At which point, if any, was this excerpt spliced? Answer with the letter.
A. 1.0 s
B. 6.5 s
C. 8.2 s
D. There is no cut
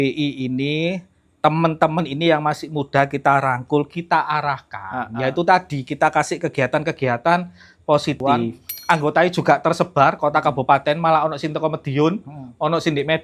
C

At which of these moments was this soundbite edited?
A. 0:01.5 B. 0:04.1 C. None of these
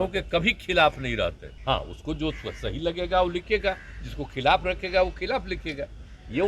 A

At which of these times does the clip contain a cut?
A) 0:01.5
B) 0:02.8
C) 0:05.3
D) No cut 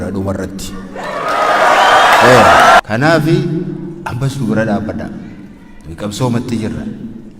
B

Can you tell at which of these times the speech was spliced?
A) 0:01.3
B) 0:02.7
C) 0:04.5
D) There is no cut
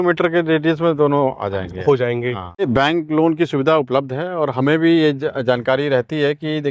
B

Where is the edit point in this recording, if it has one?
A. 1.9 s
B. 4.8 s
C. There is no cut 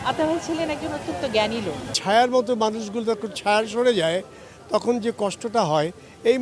A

